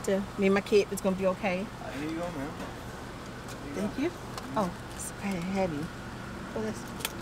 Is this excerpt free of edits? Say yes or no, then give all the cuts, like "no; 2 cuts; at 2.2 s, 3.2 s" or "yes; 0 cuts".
yes; 0 cuts